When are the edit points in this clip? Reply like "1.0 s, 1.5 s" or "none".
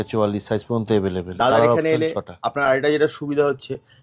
none